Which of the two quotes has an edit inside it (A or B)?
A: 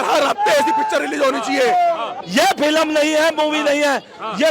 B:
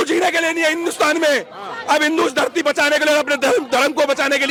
A